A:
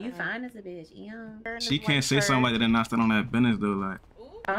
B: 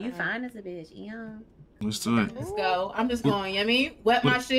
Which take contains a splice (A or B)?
A